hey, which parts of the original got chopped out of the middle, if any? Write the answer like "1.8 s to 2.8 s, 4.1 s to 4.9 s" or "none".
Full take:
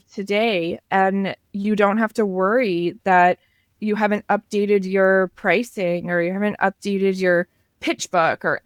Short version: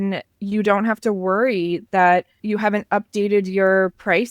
3.5 s to 3.7 s